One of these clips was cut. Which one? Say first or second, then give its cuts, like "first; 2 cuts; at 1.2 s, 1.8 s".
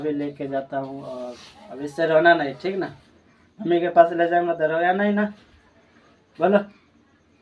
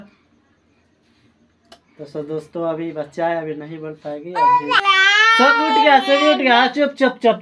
second; 1 cut; at 4.8 s